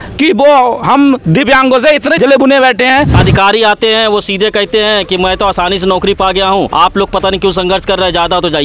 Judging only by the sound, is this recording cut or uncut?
cut